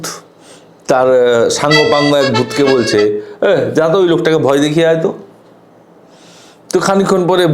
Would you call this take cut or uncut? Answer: uncut